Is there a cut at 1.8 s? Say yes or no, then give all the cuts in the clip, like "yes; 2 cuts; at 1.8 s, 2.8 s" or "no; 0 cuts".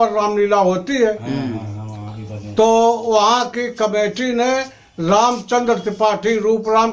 no; 0 cuts